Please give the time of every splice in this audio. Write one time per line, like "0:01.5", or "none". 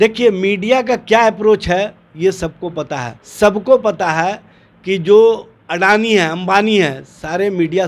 0:03.2